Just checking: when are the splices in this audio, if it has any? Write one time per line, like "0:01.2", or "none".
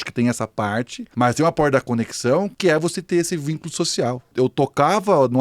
0:01.0
0:02.5
0:04.3

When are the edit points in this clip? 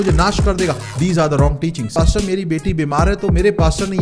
0:01.9

